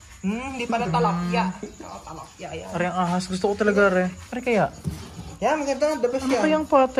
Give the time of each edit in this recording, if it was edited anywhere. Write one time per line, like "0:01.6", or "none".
0:04.3